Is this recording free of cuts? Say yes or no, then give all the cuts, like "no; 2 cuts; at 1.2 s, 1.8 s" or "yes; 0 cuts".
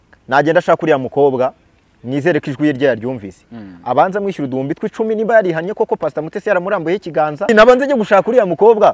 no; 1 cut; at 7.5 s